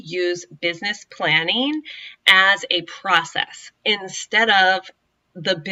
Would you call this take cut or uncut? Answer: uncut